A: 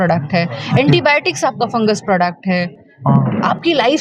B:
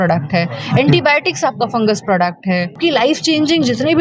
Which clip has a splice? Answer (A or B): B